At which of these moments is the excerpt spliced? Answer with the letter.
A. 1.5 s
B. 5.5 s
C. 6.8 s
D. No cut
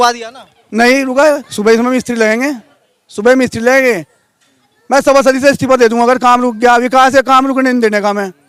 D